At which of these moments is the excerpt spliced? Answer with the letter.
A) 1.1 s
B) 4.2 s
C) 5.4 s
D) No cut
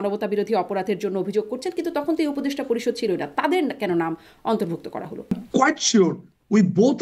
C